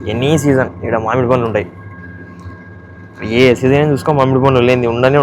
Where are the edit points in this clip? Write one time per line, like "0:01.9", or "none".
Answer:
none